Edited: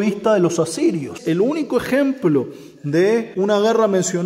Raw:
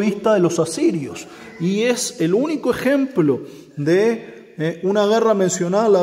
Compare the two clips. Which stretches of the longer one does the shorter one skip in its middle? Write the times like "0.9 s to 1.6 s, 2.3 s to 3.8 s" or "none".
1.1 s to 2.1 s, 4.2 s to 4.8 s